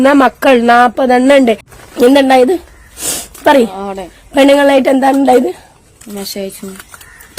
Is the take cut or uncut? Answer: cut